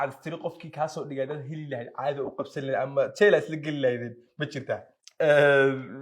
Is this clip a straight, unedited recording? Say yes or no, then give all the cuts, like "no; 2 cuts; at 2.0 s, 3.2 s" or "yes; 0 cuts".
no; 1 cut; at 5.0 s